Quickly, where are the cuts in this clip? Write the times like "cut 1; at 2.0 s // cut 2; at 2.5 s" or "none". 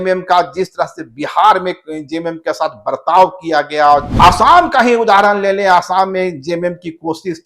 cut 1; at 4.1 s